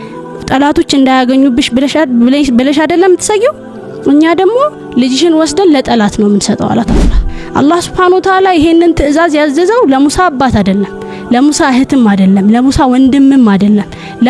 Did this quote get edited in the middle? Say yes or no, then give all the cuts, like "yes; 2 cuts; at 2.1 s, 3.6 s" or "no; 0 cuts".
yes; 1 cut; at 7.0 s